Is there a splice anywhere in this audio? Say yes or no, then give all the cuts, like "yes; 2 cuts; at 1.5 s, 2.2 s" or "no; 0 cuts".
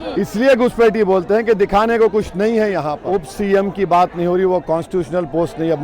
yes; 1 cut; at 3.0 s